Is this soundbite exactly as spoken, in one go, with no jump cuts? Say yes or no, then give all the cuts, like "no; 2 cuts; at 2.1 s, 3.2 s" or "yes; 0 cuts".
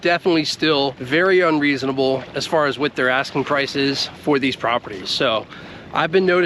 yes; 0 cuts